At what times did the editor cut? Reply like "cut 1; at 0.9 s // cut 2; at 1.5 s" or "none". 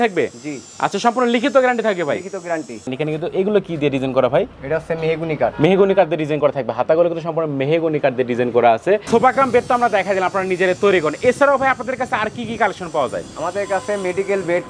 cut 1; at 2.9 s // cut 2; at 4.6 s // cut 3; at 9.1 s